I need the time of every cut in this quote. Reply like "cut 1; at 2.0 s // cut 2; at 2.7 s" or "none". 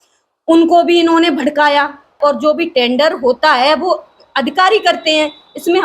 cut 1; at 2.2 s